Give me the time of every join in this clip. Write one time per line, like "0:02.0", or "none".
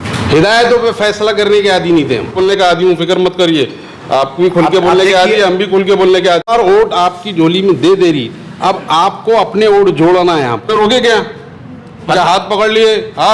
0:02.4
0:06.5
0:10.7